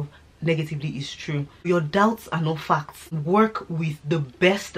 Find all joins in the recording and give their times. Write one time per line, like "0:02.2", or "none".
0:01.7
0:03.2

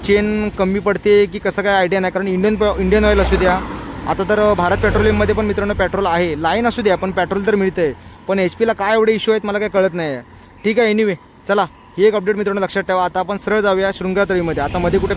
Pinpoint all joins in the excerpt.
none

